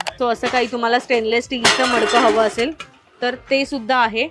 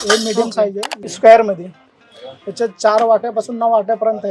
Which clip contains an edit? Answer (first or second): second